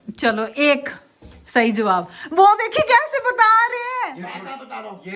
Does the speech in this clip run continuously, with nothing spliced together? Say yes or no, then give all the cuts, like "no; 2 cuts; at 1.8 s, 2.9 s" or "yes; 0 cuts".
yes; 0 cuts